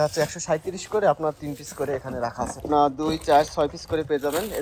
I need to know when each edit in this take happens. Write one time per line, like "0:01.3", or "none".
0:02.7